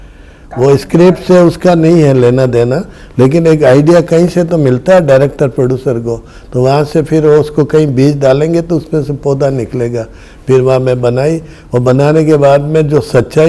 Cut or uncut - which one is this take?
uncut